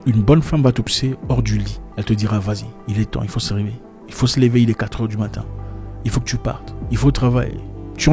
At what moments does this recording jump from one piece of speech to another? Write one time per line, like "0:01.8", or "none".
0:00.9